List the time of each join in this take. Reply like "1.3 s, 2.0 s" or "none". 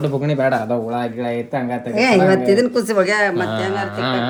none